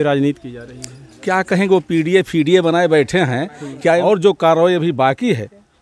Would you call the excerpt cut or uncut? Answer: cut